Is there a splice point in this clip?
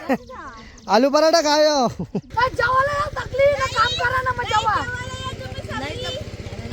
yes; 1 cut; at 2.2 s

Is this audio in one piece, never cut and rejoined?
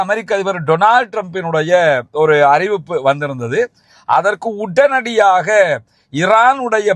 yes; 0 cuts

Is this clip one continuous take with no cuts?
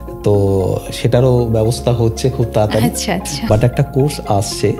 no; 1 cut; at 3.5 s

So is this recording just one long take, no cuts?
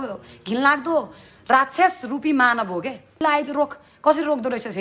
no; 1 cut; at 3.2 s

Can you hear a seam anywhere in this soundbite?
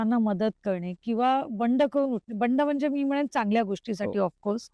no; 0 cuts

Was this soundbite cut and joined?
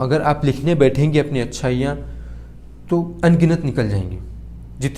no; 0 cuts

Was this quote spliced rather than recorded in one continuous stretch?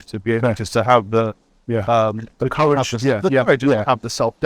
no; 0 cuts

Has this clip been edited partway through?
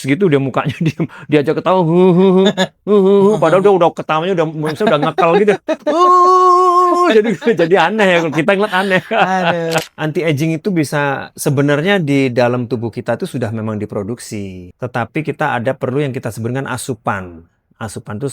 yes; 2 cuts; at 9.9 s, 14.6 s

